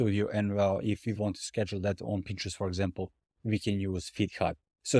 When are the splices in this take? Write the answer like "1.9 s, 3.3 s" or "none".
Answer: none